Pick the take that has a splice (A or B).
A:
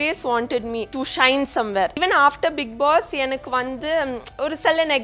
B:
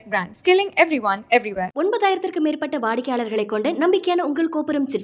A